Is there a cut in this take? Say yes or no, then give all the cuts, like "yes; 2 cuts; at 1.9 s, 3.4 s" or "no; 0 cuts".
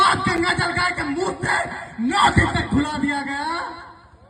no; 0 cuts